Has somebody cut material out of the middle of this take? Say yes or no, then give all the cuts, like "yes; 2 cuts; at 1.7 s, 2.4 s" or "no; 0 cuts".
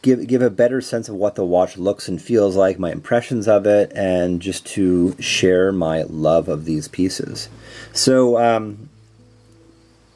no; 0 cuts